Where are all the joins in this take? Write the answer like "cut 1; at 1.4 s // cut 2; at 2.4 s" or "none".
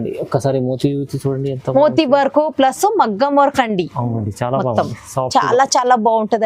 none